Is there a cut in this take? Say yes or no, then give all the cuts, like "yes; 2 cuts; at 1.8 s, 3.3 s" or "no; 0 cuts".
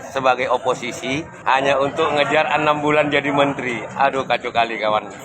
yes; 1 cut; at 1.3 s